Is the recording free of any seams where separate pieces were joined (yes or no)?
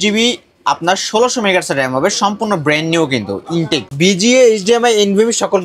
no